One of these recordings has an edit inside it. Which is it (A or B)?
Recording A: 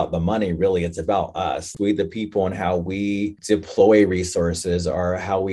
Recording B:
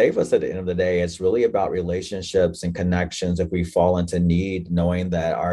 A